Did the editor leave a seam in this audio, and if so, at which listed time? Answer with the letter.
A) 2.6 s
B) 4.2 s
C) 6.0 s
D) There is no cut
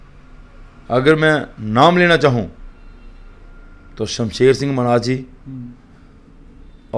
D